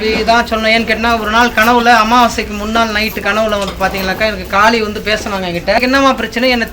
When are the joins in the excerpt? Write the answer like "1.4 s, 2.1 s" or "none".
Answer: 5.8 s